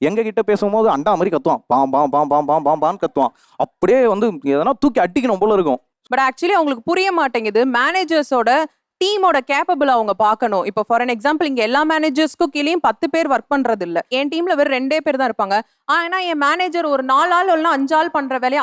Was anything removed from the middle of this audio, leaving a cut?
yes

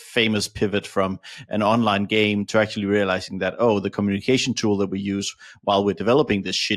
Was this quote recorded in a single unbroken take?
yes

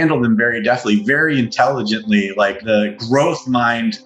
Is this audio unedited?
no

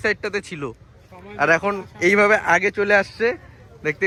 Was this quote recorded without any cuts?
yes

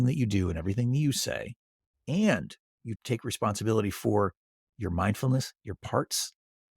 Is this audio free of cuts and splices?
no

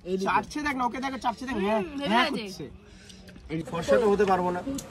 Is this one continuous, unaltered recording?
no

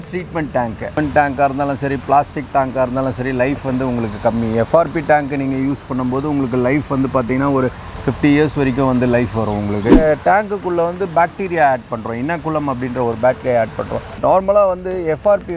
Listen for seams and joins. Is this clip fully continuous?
no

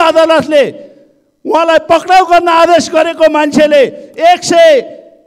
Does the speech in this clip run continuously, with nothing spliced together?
yes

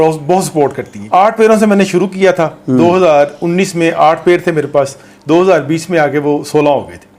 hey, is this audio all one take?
no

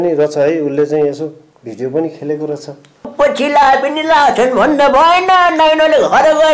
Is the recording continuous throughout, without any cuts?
no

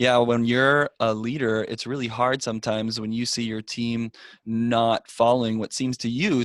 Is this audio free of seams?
no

